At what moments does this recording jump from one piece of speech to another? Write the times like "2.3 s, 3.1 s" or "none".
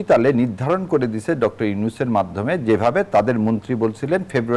none

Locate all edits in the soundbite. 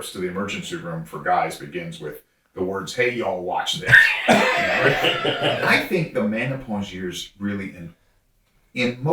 5.6 s

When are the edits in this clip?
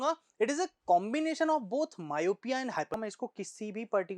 2.9 s

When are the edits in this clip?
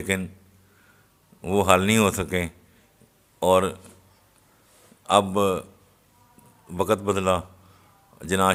none

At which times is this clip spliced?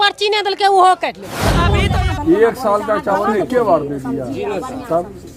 1.7 s

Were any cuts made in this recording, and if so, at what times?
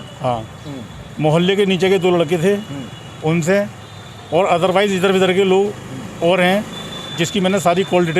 none

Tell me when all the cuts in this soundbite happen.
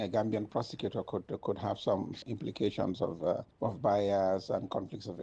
none

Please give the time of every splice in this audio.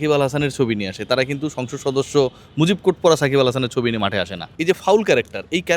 4.4 s

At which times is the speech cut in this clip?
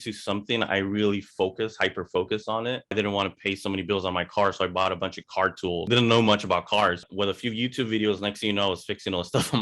2.9 s, 5.9 s, 7.0 s

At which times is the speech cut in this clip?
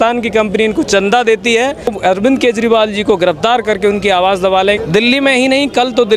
2.0 s, 4.8 s

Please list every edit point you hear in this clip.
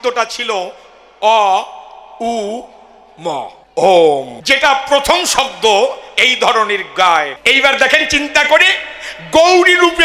3.6 s, 4.3 s, 7.4 s

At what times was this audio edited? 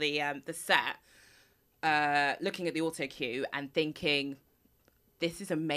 none

